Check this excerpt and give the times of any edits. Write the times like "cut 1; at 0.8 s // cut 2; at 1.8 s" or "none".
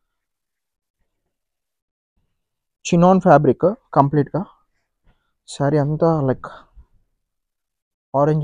none

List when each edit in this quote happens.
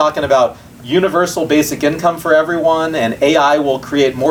none

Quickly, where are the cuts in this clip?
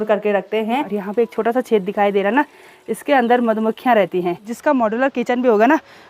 cut 1; at 0.9 s // cut 2; at 4.5 s

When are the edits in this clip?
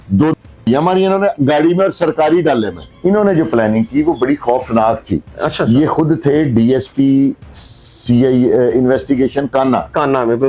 cut 1; at 2.8 s

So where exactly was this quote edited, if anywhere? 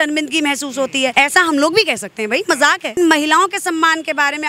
cut 1; at 1.1 s // cut 2; at 2.9 s

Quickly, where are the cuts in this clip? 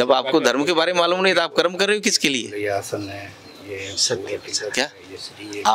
none

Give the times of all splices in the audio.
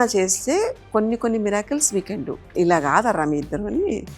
cut 1; at 2.5 s

